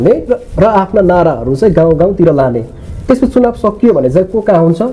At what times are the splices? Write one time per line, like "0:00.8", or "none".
none